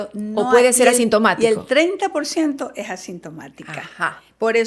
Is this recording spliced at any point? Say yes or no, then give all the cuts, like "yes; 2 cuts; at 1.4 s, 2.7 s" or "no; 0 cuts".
no; 0 cuts